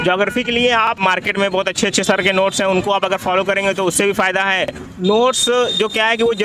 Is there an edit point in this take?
yes; 2 cuts; at 1.0 s, 4.8 s

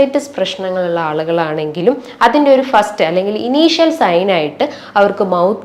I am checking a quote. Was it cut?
no; 0 cuts

